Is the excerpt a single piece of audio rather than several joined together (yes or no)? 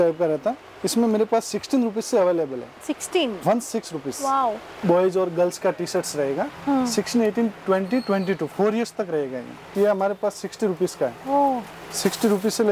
no